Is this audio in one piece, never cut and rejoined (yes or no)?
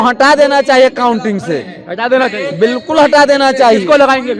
yes